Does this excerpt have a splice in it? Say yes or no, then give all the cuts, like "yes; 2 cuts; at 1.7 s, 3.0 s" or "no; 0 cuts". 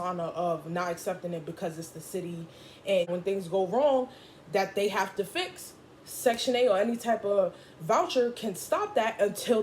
yes; 1 cut; at 3.1 s